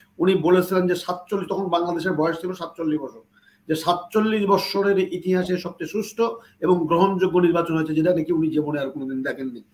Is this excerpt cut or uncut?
uncut